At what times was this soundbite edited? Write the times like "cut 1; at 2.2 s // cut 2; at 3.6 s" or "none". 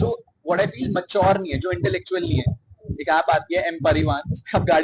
none